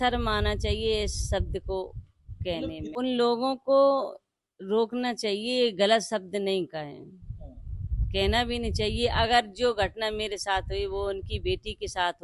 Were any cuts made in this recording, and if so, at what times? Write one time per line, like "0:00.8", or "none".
0:02.8